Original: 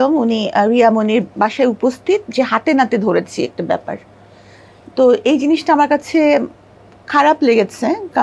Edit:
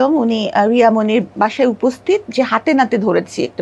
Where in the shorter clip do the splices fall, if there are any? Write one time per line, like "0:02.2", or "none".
none